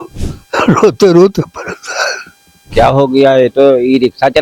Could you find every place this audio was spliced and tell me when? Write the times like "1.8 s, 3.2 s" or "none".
2.7 s